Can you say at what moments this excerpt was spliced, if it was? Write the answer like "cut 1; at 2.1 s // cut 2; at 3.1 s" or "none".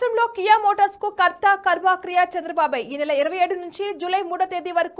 none